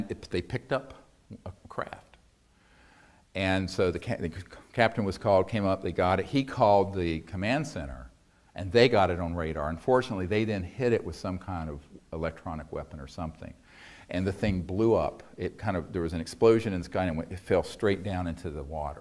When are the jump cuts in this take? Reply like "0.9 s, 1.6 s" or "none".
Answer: 17.7 s